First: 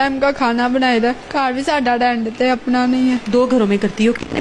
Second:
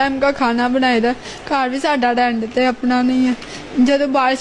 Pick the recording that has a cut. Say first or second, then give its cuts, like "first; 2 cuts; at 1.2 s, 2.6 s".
first; 2 cuts; at 1.1 s, 3.2 s